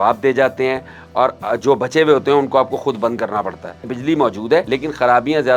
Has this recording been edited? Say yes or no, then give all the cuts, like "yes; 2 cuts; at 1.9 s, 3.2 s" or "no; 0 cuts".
yes; 2 cuts; at 3.9 s, 4.7 s